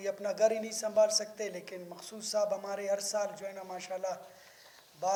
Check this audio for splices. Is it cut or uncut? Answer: uncut